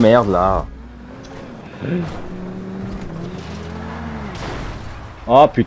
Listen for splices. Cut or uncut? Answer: cut